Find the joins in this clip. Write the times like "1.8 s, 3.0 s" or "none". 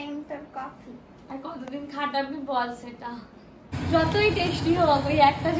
3.7 s